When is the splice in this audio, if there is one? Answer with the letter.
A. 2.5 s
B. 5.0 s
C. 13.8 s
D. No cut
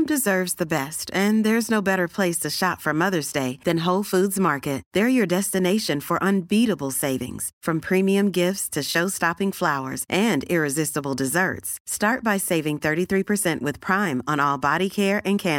D